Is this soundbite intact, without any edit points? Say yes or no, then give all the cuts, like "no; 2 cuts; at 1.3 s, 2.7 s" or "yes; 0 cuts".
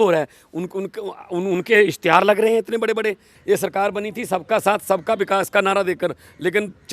no; 1 cut; at 3.3 s